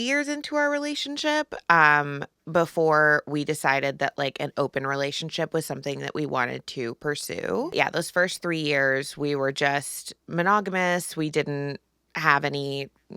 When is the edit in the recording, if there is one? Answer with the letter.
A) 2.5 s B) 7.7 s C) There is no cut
B